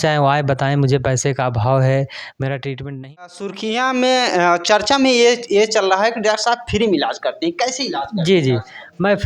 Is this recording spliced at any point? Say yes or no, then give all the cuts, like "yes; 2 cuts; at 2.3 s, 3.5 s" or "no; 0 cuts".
yes; 1 cut; at 3.4 s